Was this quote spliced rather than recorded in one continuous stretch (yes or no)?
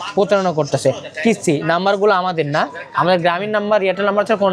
no